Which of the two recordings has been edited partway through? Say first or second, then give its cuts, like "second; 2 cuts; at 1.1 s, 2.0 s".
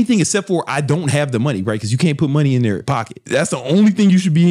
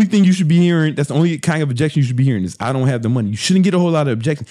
first; 1 cut; at 2.8 s